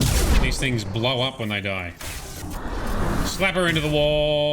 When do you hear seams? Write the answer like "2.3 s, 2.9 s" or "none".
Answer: 2.4 s